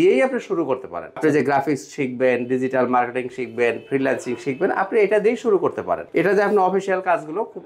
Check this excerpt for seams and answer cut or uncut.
cut